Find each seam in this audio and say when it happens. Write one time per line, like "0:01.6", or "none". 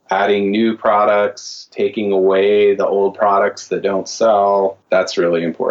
0:04.8